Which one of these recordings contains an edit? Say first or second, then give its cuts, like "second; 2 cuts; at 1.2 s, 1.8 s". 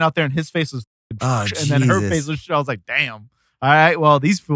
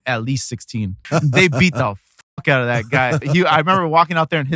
second; 2 cuts; at 1.1 s, 3.2 s